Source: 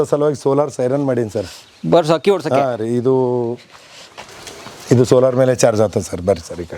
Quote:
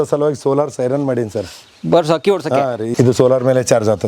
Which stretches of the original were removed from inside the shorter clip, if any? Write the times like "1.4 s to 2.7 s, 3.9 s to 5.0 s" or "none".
2.9 s to 4.8 s